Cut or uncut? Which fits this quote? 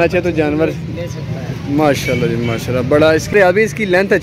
cut